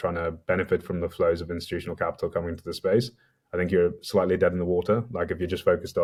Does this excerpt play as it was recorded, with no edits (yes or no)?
yes